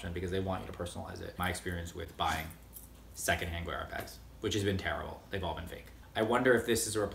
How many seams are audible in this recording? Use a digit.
3